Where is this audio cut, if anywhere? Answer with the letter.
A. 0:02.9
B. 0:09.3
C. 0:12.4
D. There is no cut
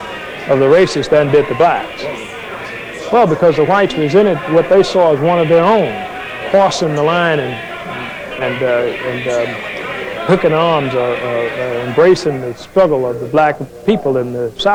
D